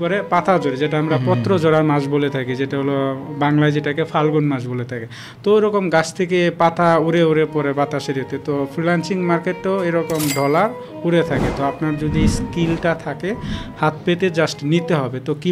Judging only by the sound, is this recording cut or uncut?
uncut